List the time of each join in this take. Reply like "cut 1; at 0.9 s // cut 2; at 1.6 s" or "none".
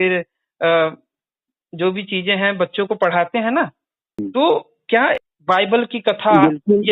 cut 1; at 4.2 s // cut 2; at 5.3 s